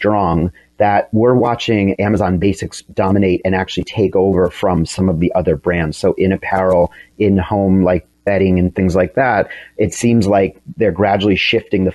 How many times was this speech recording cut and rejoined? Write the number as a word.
one